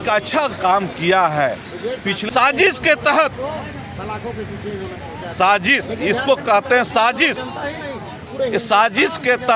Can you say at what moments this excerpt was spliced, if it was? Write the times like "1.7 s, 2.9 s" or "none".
2.2 s